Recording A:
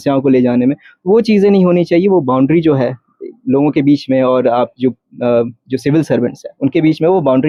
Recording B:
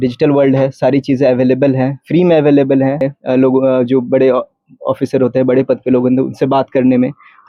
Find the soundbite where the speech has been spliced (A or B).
B